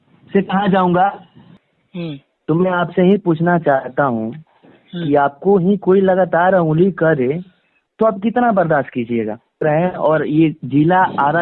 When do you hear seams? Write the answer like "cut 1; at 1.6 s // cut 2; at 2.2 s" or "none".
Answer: cut 1; at 1.4 s // cut 2; at 9.6 s

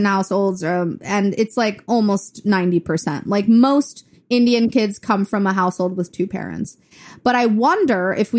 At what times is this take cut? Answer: none

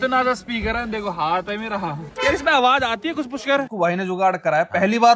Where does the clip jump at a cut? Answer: cut 1; at 2.0 s // cut 2; at 3.7 s

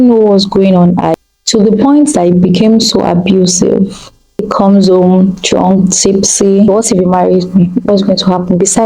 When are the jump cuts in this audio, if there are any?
cut 1; at 1.1 s // cut 2; at 4.5 s // cut 3; at 6.7 s

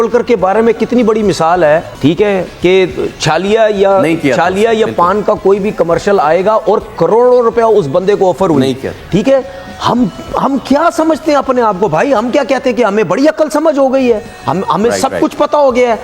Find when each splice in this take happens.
none

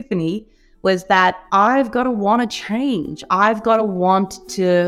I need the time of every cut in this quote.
none

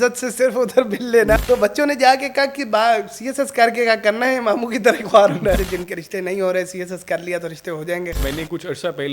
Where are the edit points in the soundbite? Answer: cut 1; at 1.4 s // cut 2; at 5.6 s // cut 3; at 8.1 s

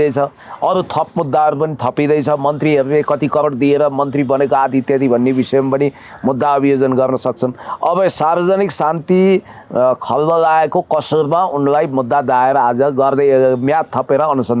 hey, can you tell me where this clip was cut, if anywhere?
none

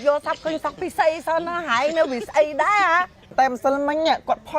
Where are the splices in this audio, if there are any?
cut 1; at 3.3 s

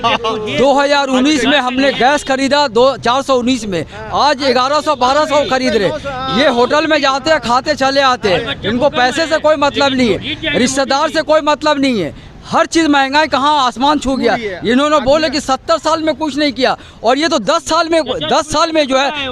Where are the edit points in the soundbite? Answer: none

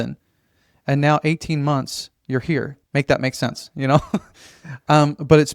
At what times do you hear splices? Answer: cut 1; at 2.7 s

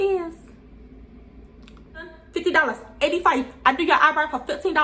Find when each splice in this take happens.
cut 1; at 1.9 s

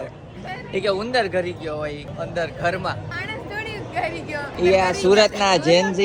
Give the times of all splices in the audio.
cut 1; at 2.1 s // cut 2; at 3.1 s // cut 3; at 4.6 s

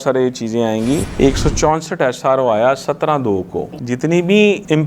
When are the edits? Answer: cut 1; at 1.1 s // cut 2; at 3.7 s

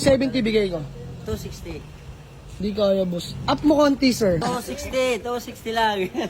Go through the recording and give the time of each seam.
cut 1; at 4.4 s

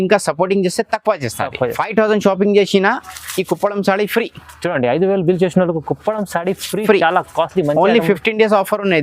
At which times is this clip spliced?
cut 1; at 1.8 s

